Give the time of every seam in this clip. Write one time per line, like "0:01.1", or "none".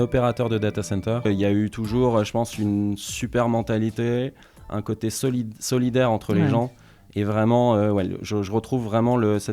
0:01.3

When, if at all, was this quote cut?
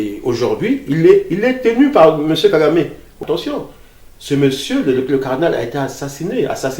0:03.1

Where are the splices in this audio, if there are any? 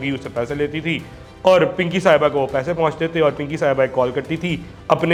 none

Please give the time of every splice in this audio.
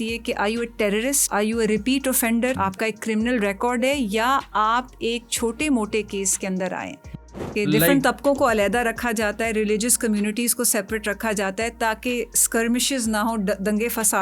0:01.2
0:02.6
0:07.4

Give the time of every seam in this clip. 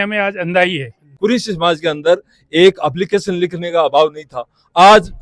0:01.0

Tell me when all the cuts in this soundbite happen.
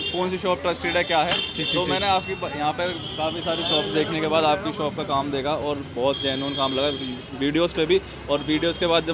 none

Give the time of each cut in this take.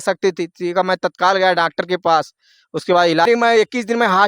0:03.3

